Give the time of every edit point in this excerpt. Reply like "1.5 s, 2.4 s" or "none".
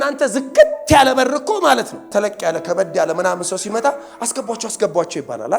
2.1 s